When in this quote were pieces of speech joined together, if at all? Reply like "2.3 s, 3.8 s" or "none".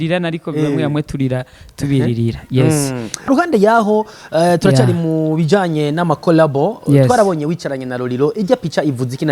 3.3 s